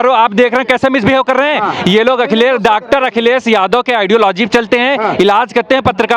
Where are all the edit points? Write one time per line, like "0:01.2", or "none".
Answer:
none